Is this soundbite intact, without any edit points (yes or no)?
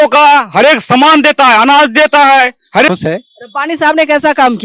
no